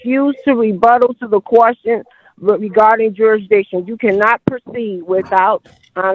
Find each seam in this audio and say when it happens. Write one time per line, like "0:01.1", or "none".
none